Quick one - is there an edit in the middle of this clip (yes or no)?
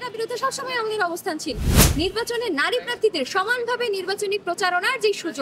yes